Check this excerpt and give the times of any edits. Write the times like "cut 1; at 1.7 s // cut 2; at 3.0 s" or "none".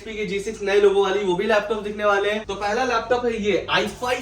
cut 1; at 2.5 s